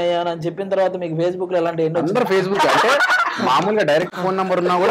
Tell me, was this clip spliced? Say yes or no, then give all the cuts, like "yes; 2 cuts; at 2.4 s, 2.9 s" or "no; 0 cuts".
no; 0 cuts